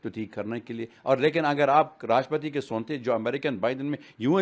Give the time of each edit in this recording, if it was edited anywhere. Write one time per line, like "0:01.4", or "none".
none

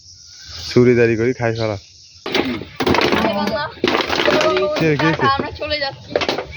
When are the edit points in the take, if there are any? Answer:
0:02.3

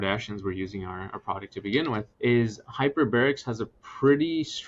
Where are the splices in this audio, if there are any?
0:02.1

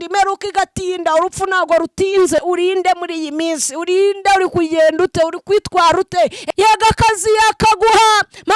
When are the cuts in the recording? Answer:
0:02.4
0:06.4

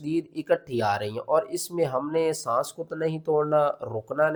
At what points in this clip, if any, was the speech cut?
none

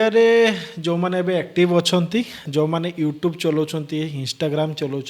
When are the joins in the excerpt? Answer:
0:02.4

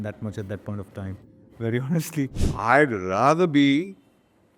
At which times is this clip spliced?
0:02.4

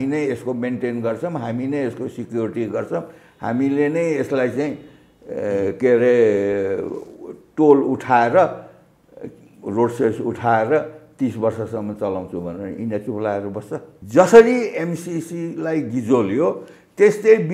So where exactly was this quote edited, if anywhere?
0:13.9

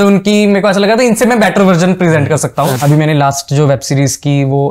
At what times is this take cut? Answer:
0:02.8

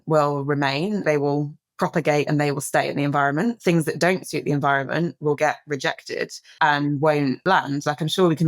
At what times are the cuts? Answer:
0:01.0
0:06.4
0:07.4

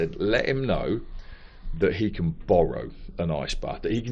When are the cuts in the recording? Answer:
none

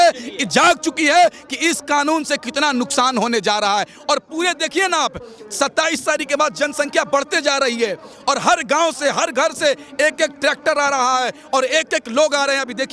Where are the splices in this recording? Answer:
none

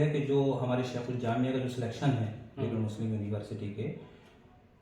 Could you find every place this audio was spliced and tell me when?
none

